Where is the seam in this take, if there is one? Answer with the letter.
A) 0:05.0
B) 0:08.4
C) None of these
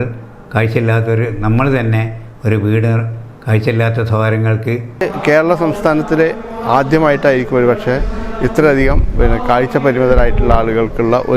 A